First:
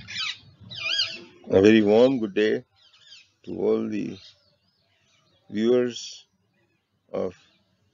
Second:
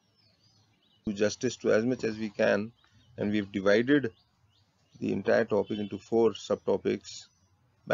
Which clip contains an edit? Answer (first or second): second